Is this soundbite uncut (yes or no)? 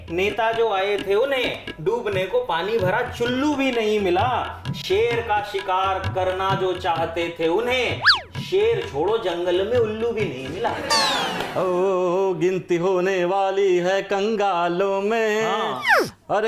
no